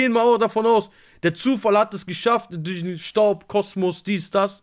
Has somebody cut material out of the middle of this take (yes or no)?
no